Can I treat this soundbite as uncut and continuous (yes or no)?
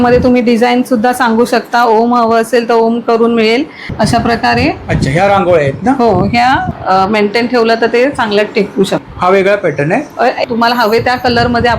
no